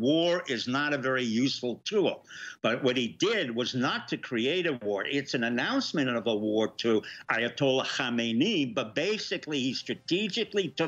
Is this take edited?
no; 0 cuts

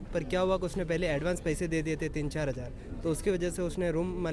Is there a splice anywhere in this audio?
no; 0 cuts

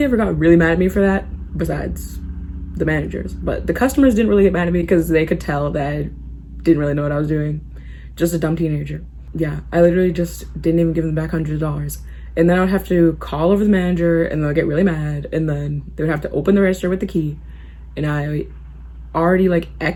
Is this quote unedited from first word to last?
yes; 0 cuts

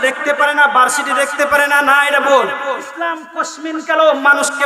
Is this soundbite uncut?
no; 1 cut; at 2.9 s

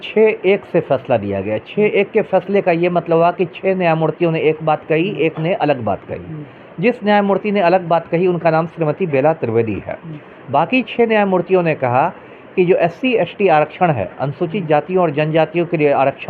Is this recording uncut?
yes; 0 cuts

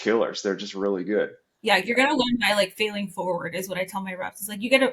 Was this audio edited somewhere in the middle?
yes; 1 cut; at 1.5 s

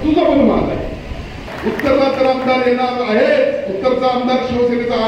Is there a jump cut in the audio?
yes; 1 cut; at 1.5 s

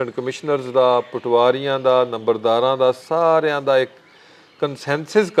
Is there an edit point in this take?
no; 0 cuts

